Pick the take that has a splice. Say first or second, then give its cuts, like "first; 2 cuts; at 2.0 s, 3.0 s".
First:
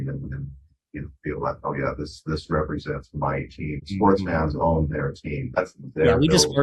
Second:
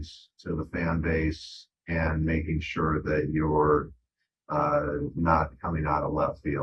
first; 2 cuts; at 3.8 s, 5.6 s